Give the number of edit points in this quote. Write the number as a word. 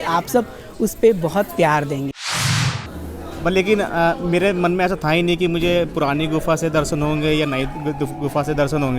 one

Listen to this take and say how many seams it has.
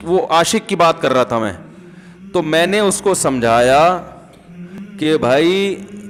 zero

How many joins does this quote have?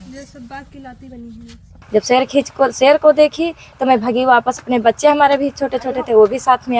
one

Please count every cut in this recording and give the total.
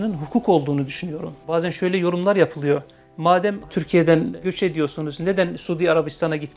one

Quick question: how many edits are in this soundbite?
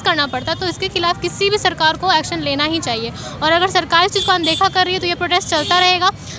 zero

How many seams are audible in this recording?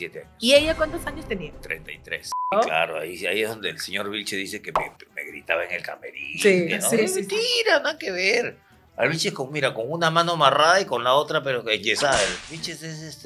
two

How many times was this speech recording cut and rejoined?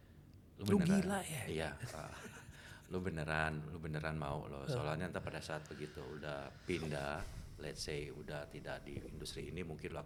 zero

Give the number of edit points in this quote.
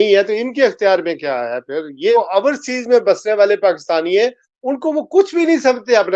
one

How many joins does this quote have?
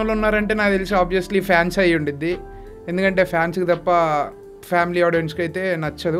zero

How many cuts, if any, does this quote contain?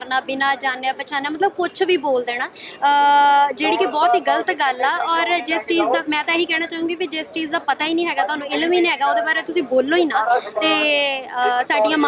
zero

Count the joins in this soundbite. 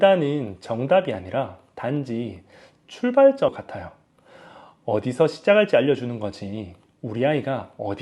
one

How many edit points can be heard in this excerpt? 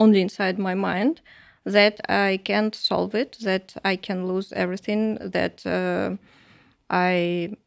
zero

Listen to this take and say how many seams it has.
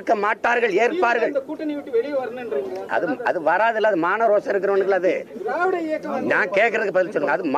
one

